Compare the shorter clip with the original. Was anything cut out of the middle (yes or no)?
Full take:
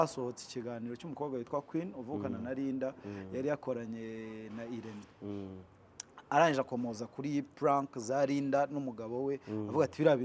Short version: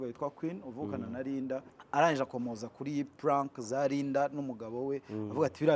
yes